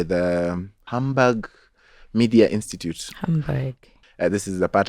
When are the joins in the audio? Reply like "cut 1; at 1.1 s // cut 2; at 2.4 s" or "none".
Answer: cut 1; at 4.0 s